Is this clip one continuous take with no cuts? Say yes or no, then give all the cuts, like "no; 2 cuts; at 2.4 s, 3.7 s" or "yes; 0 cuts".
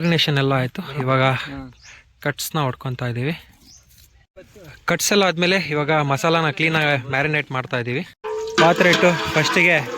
no; 2 cuts; at 4.3 s, 8.1 s